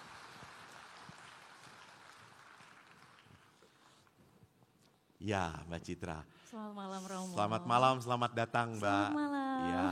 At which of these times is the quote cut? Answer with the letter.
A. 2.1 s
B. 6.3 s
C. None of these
C